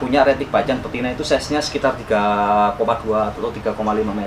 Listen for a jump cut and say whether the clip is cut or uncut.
uncut